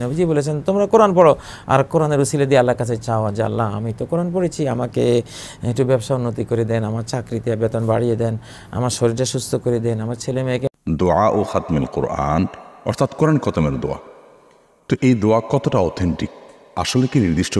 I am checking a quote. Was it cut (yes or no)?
yes